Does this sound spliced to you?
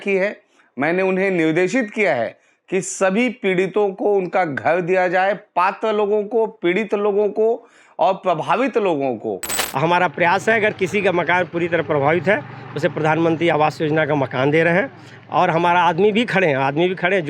yes; 1 cut; at 9.5 s

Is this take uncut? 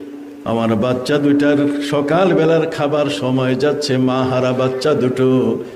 yes; 0 cuts

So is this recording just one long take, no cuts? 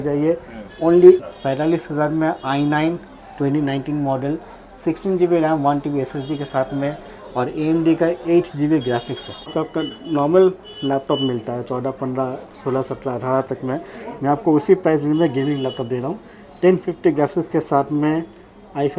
no; 2 cuts; at 1.2 s, 9.5 s

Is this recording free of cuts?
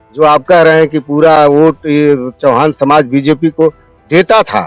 yes; 0 cuts

